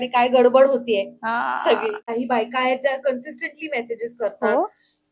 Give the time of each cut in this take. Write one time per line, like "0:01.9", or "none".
0:02.0